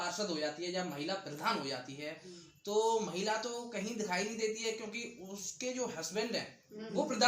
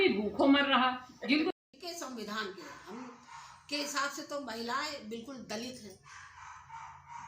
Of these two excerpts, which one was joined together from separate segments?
second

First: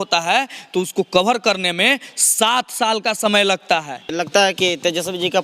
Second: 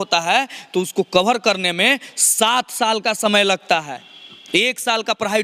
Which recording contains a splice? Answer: first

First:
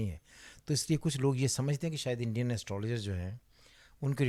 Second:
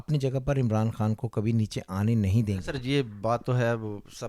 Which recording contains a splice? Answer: second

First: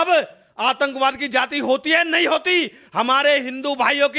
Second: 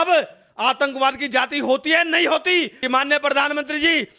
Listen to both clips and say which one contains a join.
second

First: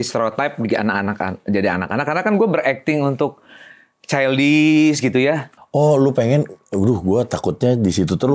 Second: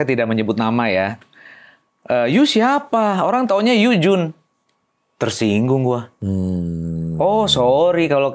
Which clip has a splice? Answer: first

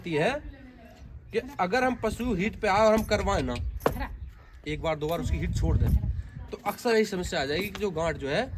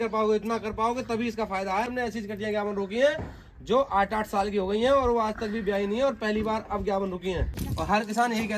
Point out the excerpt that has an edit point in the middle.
second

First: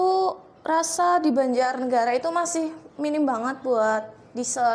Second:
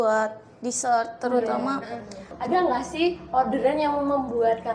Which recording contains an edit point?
second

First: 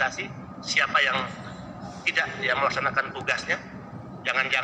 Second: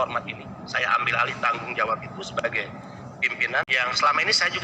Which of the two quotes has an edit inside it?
second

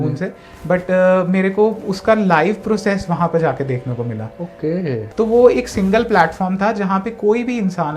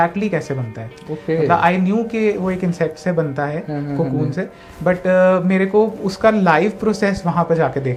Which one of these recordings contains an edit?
first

